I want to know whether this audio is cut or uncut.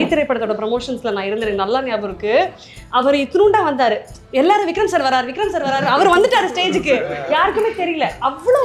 uncut